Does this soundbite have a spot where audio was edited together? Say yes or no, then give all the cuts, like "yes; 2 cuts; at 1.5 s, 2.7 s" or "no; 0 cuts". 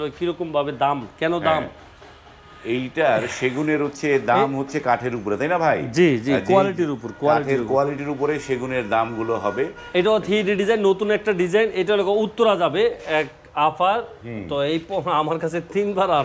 no; 0 cuts